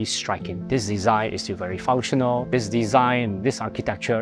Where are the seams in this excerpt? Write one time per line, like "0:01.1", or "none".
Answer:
0:02.5